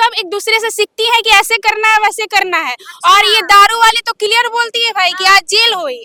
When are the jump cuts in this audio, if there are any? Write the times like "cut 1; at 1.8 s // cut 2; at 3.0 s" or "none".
none